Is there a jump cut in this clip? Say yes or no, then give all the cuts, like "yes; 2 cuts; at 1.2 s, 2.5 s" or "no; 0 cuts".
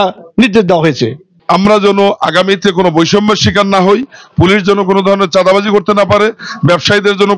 yes; 1 cut; at 1.3 s